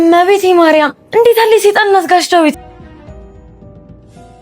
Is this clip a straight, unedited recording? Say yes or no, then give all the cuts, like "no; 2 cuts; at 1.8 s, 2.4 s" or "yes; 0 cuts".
no; 1 cut; at 2.9 s